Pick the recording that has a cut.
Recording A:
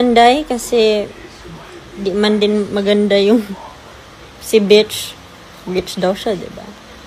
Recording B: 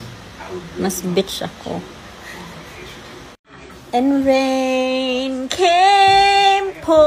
B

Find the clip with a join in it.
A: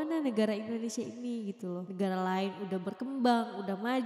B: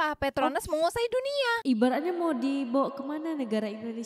B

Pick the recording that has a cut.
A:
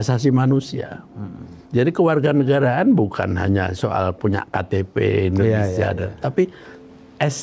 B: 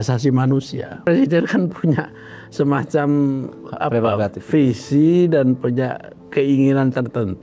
B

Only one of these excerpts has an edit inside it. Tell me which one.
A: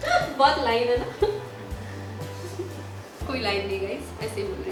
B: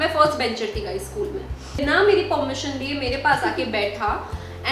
B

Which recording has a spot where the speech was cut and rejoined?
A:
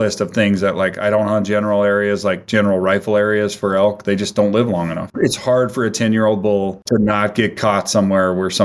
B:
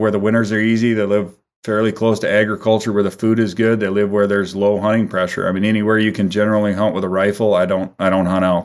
A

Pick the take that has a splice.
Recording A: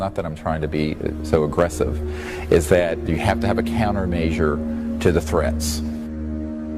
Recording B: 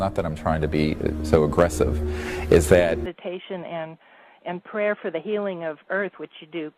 A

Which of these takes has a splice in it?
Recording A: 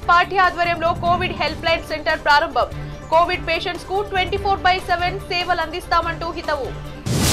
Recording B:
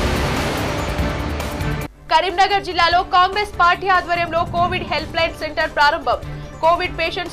B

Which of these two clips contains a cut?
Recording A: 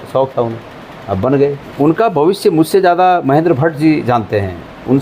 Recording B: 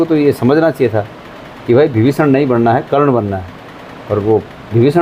A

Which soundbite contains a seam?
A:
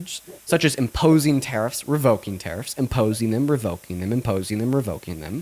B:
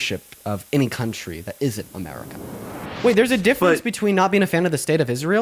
B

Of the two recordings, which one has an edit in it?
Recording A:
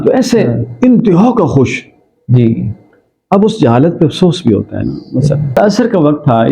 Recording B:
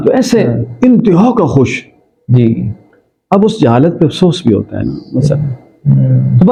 A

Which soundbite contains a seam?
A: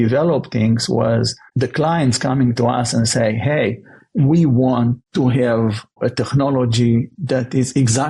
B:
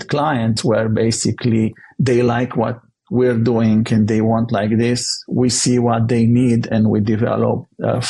A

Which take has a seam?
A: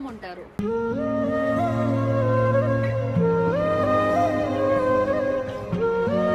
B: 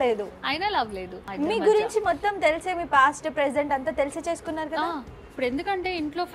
B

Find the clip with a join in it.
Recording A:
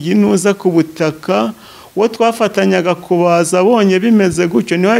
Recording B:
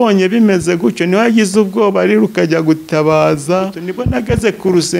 B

